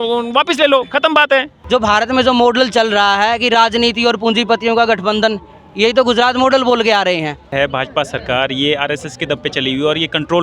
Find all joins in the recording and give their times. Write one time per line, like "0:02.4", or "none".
0:01.6
0:07.5

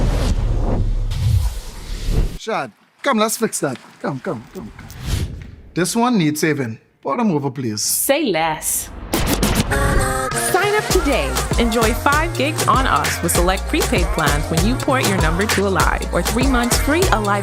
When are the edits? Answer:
none

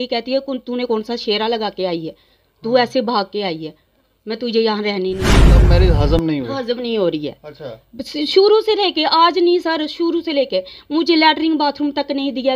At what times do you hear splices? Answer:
0:05.5

